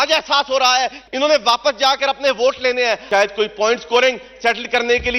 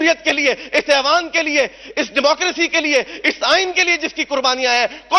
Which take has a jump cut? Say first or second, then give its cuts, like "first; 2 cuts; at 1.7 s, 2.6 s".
first; 2 cuts; at 1.0 s, 3.0 s